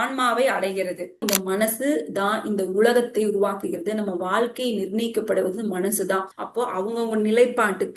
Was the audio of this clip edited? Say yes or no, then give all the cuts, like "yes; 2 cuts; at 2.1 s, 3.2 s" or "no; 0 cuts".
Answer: yes; 1 cut; at 1.2 s